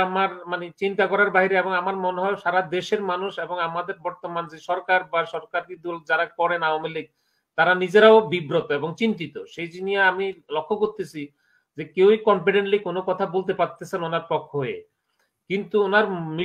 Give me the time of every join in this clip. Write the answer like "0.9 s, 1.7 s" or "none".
none